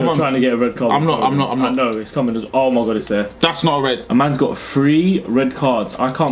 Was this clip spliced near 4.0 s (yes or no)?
yes